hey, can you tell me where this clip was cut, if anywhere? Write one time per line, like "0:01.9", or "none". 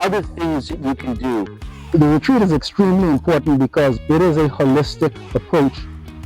0:01.6
0:04.0

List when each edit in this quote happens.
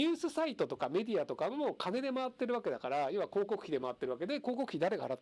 none

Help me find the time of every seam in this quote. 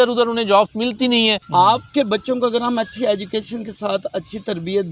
0:01.4

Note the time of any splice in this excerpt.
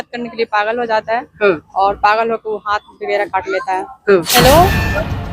0:04.3

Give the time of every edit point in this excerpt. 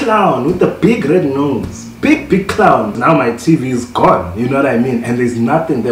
0:03.0

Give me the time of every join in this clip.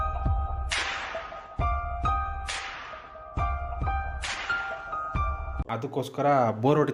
none

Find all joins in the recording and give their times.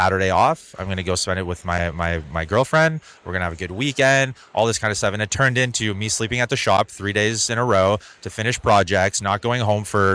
none

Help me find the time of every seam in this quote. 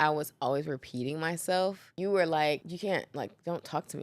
0:01.9
0:02.7

